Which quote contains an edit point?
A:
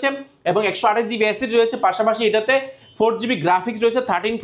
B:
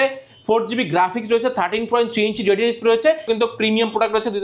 B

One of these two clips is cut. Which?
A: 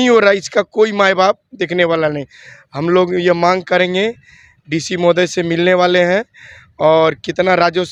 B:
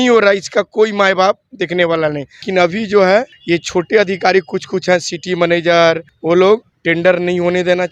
B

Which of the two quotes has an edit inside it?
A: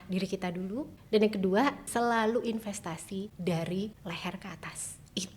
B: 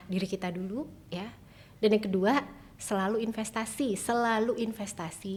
A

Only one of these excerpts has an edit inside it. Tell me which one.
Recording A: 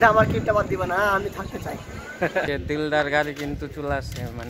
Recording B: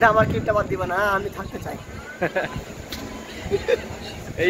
A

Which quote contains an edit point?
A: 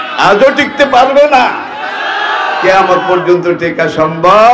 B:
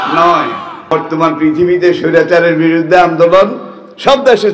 B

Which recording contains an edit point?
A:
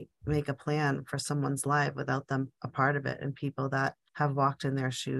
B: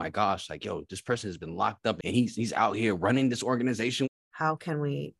B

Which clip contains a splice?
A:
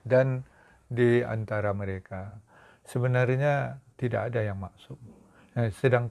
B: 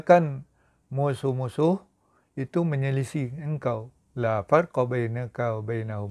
A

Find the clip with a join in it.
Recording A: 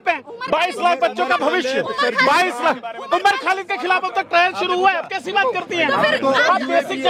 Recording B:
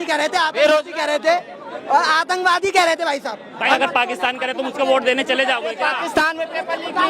B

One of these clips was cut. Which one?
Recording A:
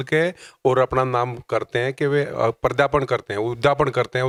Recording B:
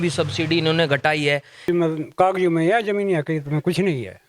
B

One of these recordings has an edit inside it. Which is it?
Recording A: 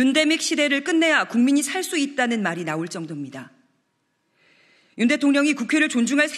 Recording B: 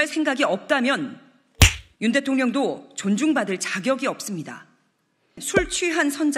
B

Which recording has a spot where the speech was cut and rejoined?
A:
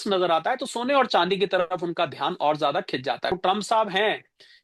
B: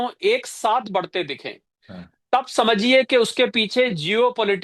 A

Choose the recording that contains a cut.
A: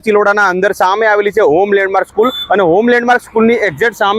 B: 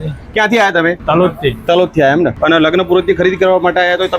B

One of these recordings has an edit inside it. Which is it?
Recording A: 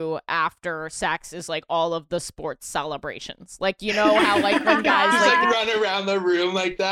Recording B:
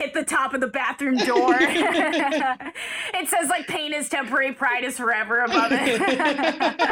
A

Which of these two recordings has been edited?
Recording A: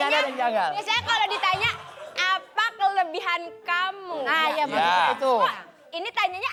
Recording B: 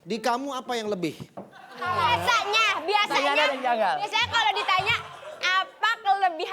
B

